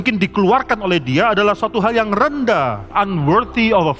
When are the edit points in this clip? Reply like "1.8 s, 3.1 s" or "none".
2.9 s